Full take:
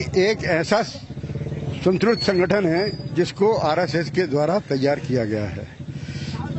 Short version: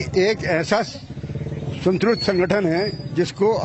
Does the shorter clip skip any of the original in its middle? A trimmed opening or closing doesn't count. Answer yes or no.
no